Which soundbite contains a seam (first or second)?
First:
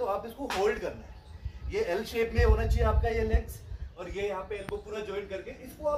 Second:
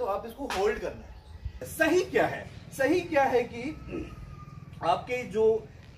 second